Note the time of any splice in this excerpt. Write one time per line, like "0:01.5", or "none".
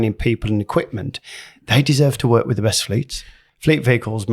0:03.4